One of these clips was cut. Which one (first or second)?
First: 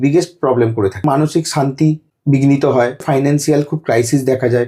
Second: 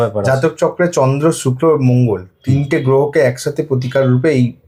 first